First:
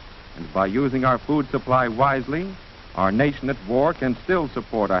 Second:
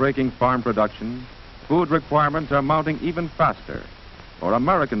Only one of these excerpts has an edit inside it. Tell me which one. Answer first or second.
second